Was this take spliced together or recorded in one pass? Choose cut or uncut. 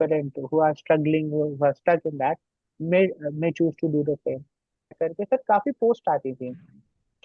cut